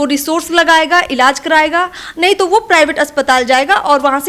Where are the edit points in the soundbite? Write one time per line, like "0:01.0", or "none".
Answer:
none